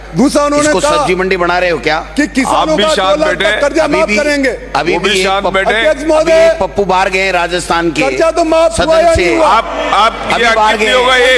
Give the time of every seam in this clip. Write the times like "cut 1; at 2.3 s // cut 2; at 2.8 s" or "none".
none